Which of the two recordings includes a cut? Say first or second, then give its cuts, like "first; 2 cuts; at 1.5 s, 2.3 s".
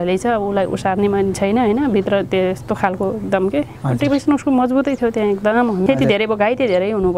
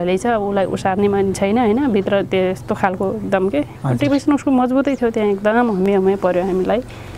first; 1 cut; at 5.8 s